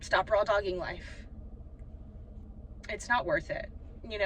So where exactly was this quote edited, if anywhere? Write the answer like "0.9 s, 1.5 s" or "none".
2.4 s